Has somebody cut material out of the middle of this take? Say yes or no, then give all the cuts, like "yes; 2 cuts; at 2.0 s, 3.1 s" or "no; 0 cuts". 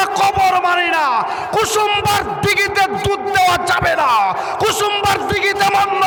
no; 0 cuts